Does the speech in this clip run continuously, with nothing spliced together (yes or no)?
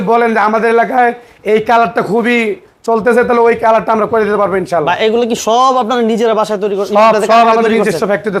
yes